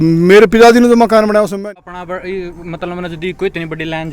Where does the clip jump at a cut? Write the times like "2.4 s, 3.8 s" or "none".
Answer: 1.6 s